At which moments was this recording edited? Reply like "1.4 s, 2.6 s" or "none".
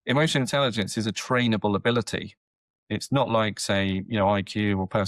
none